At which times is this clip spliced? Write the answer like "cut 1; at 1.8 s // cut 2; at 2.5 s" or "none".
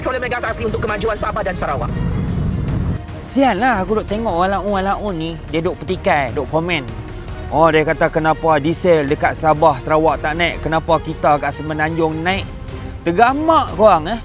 cut 1; at 3.0 s